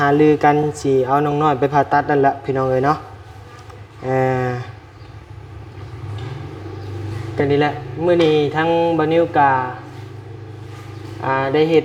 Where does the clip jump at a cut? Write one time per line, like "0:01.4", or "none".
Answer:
none